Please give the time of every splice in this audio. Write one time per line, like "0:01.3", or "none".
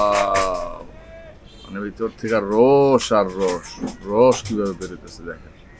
none

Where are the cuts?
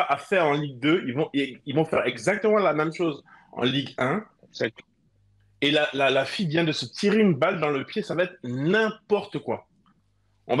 0:04.7

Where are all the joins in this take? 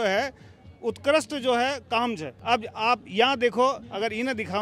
none

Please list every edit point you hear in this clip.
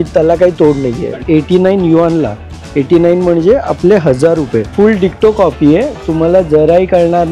0:01.2

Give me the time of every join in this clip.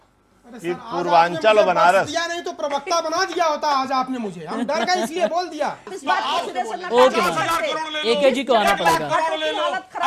0:05.9

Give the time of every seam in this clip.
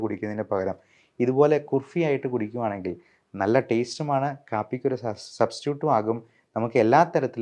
none

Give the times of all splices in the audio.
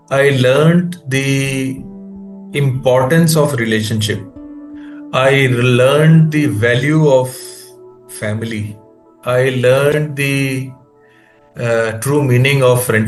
none

